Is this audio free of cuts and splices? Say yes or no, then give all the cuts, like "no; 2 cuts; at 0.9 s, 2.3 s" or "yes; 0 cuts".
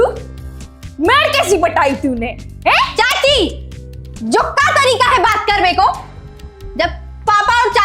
yes; 0 cuts